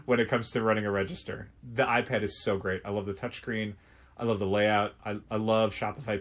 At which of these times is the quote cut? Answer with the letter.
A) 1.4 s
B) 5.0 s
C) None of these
B